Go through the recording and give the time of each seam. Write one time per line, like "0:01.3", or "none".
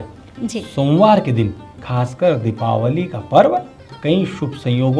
none